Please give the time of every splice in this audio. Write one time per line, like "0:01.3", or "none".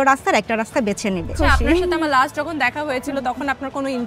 0:01.3

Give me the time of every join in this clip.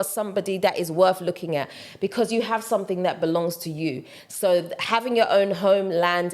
none

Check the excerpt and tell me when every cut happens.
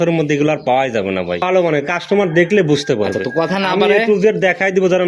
0:01.4

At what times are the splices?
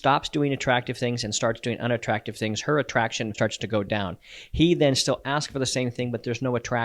0:03.3

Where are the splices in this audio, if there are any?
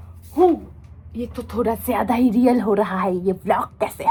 none

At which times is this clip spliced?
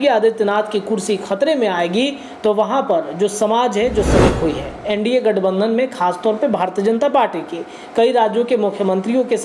0:04.3

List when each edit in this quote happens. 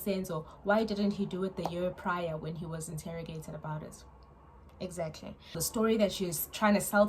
0:05.6

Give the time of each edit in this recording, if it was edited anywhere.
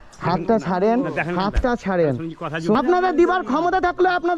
0:02.7

